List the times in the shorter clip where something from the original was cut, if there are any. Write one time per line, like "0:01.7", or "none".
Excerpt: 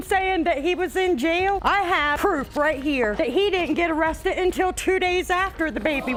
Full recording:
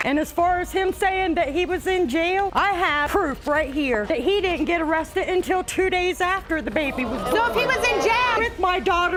none